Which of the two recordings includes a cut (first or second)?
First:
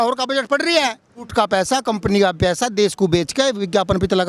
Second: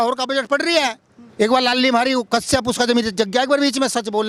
first